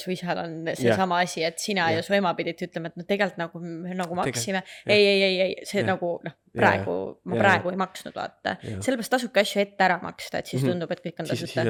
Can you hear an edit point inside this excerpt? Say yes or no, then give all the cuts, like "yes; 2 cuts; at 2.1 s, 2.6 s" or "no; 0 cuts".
no; 0 cuts